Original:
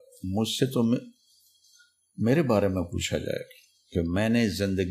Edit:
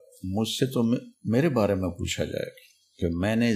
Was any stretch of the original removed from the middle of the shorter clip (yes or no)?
yes